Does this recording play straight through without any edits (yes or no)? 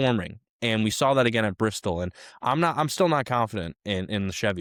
yes